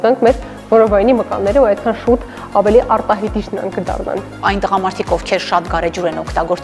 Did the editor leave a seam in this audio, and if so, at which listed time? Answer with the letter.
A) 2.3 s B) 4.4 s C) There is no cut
B